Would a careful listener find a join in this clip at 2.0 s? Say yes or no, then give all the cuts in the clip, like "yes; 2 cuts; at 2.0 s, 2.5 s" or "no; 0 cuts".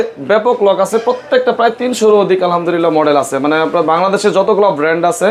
no; 0 cuts